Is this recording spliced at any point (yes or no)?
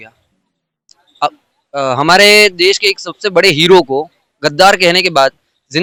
no